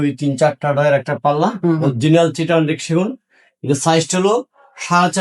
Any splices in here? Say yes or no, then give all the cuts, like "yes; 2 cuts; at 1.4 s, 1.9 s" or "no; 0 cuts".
no; 0 cuts